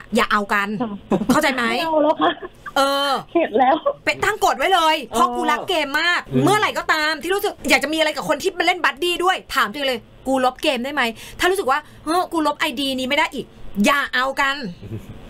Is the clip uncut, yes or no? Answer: yes